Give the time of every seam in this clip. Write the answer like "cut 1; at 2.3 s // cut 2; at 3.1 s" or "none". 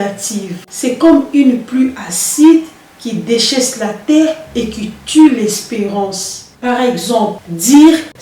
none

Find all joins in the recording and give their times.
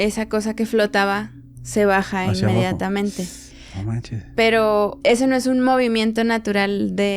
cut 1; at 5.0 s

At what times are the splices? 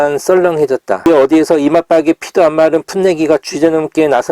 cut 1; at 1.1 s

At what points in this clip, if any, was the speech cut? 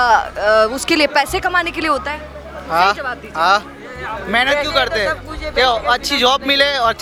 none

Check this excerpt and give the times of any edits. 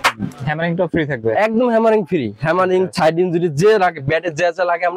none

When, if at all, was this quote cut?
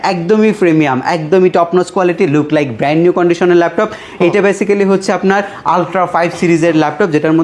none

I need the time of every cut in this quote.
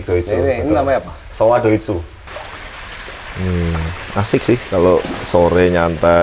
cut 1; at 2.2 s

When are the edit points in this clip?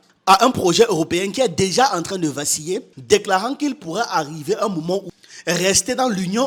none

